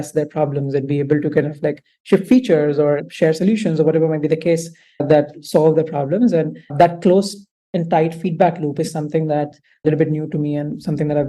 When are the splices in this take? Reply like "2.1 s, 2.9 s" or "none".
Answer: 9.8 s